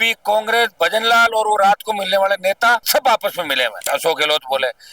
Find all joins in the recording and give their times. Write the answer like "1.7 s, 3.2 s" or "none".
3.8 s